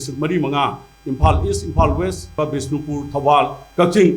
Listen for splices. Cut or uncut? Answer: cut